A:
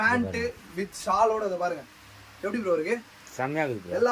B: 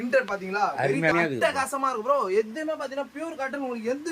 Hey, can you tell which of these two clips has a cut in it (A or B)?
B